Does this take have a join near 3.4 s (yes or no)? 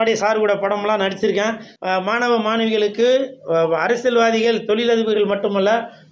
no